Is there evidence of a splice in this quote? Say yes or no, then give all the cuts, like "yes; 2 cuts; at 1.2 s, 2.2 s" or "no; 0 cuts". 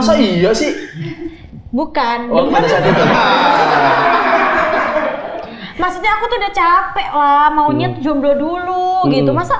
no; 0 cuts